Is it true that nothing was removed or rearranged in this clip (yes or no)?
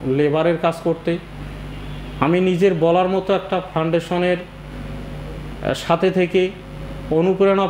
yes